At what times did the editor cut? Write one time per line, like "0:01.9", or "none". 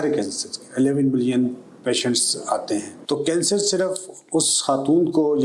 0:02.9